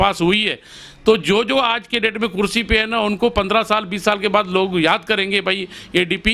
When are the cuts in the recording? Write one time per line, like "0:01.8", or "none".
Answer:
none